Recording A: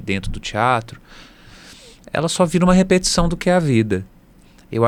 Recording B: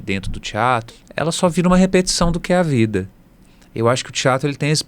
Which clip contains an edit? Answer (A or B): B